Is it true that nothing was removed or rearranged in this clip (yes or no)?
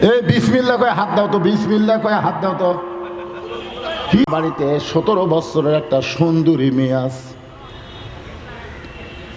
no